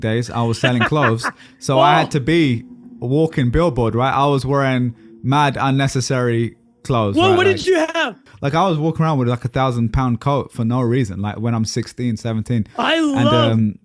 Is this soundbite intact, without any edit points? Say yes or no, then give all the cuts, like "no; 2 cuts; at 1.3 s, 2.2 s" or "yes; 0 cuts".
no; 1 cut; at 8.2 s